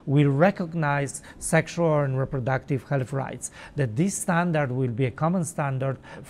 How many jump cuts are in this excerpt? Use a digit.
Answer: 0